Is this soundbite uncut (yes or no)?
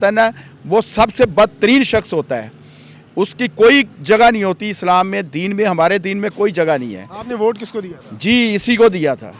yes